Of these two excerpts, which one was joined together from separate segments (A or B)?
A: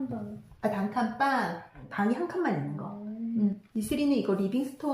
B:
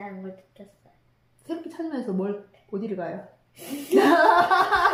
A